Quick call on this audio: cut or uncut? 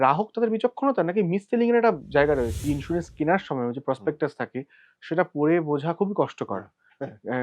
cut